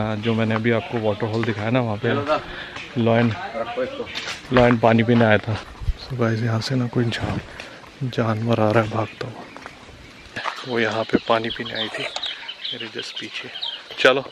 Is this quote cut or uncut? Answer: cut